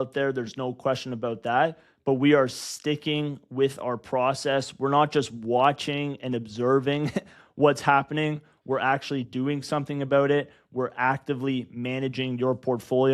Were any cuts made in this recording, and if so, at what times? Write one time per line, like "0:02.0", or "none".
none

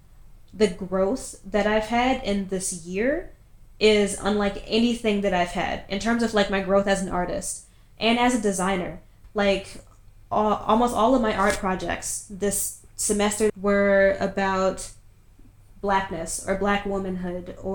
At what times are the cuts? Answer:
0:09.2
0:13.5

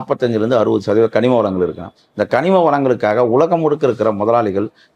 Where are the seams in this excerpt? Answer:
none

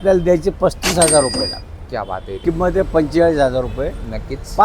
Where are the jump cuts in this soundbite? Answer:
0:02.4

